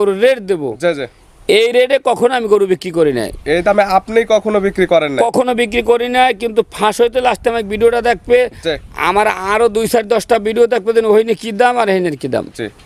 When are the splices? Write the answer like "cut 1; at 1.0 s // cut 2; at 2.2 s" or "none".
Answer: none